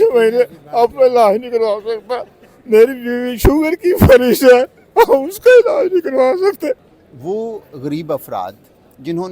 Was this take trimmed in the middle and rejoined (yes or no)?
yes